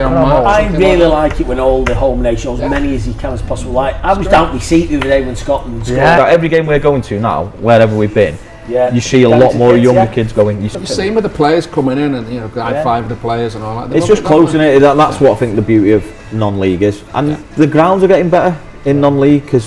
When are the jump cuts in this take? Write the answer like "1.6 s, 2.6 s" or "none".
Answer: 6.2 s, 10.7 s, 17.5 s